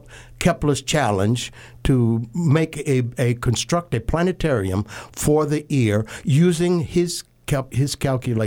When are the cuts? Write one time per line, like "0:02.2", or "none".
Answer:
none